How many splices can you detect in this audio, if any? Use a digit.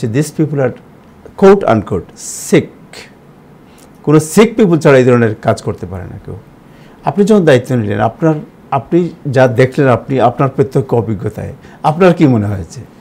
0